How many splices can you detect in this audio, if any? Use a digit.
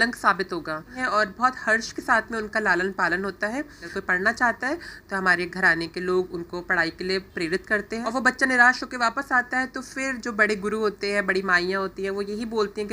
3